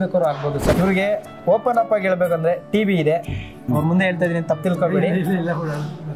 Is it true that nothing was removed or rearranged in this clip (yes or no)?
no